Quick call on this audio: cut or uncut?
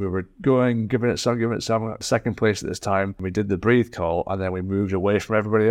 cut